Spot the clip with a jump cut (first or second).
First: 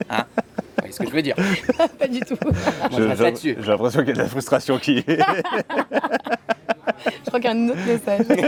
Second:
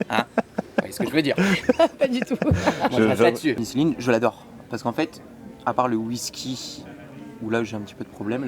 second